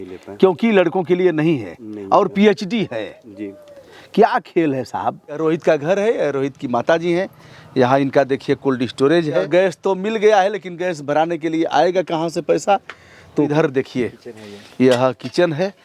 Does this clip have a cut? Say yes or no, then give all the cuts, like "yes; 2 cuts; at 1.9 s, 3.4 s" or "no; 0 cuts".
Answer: yes; 3 cuts; at 5.4 s, 9.5 s, 13.5 s